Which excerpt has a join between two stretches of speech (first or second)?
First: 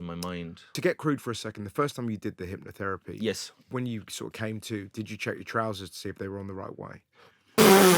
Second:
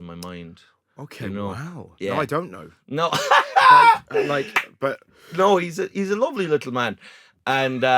first